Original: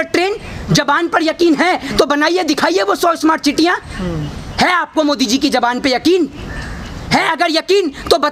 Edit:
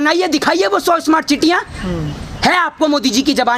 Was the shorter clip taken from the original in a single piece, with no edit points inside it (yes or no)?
yes